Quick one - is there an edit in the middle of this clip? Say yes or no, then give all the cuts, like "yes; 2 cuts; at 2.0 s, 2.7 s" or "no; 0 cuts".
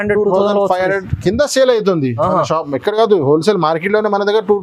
no; 0 cuts